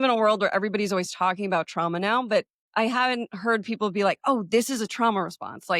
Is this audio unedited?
no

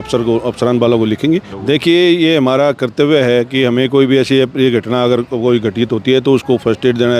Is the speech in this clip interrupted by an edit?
yes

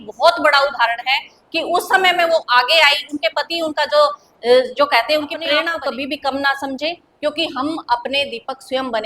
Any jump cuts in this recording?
yes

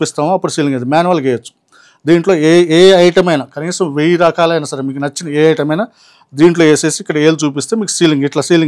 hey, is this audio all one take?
yes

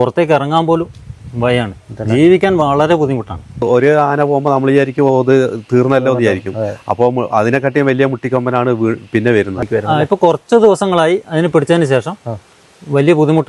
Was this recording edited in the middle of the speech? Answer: yes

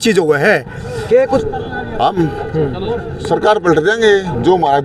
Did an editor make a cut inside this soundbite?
yes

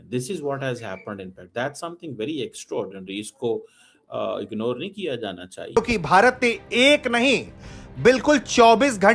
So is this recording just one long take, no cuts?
no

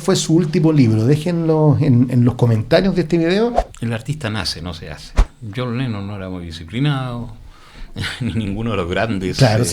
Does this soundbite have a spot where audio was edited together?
yes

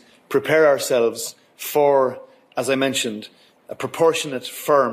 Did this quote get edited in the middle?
no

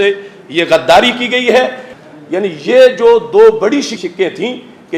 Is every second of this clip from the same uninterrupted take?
no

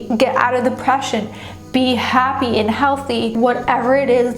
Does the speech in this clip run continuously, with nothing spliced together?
no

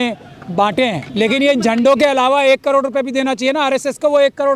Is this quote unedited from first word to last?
no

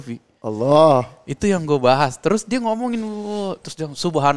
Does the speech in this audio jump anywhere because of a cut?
no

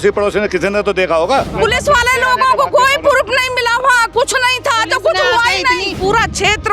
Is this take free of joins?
no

